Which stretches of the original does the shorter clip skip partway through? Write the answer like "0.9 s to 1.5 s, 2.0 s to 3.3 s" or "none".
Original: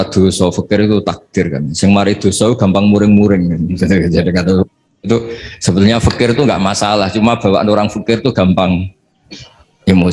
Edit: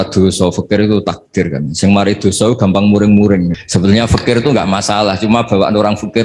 3.6 s to 5.5 s